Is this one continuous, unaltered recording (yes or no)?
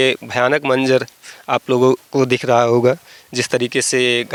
yes